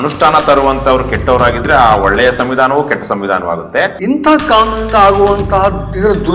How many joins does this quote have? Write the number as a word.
one